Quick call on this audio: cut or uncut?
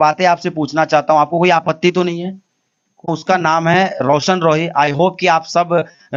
cut